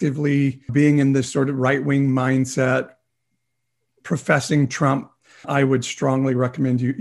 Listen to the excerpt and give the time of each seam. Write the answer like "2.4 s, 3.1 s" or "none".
5.5 s